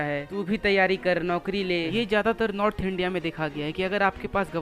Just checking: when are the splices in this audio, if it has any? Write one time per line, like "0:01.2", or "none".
0:01.9